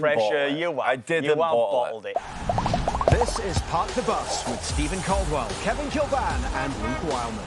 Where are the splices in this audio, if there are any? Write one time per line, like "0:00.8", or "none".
0:02.0

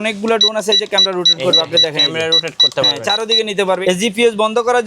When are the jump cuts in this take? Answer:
0:03.8

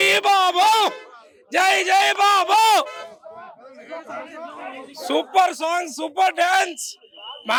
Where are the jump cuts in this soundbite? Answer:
none

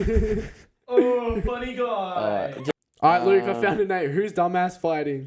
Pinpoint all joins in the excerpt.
0:02.7

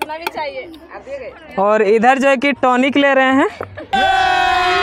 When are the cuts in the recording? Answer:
none

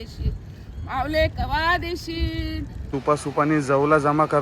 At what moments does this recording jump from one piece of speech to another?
0:02.9

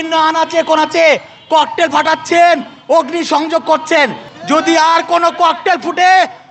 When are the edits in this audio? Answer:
0:04.3

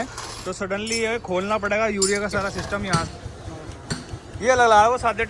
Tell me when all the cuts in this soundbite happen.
0:02.9

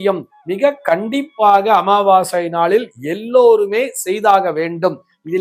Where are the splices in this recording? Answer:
none

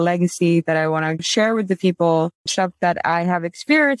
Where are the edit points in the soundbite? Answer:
0:01.3
0:02.4

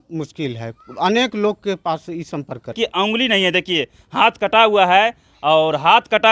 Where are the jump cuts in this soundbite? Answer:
0:02.8

